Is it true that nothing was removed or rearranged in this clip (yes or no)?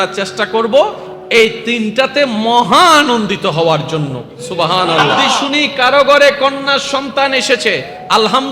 no